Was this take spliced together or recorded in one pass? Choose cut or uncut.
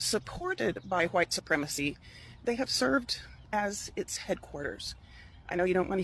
uncut